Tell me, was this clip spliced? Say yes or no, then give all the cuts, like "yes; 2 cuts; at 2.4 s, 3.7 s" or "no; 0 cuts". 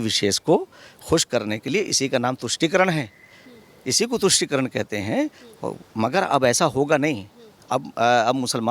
no; 0 cuts